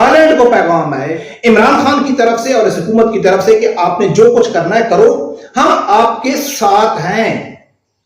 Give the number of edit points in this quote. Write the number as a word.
one